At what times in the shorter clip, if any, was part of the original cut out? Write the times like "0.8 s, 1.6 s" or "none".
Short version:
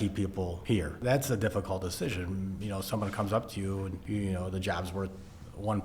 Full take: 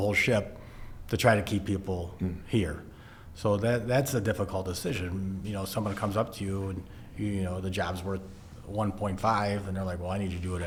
1.0 s, 4.0 s